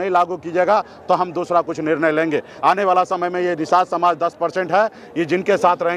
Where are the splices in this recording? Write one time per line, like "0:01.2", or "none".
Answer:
0:02.5